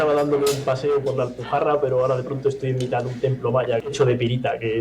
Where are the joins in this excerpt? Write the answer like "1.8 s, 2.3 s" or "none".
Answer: 3.9 s